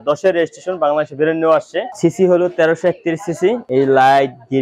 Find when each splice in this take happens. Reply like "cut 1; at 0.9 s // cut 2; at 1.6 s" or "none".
cut 1; at 1.9 s // cut 2; at 3.6 s